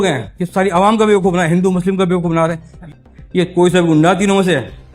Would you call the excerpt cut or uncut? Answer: cut